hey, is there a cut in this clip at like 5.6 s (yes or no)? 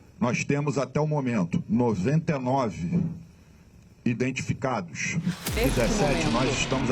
yes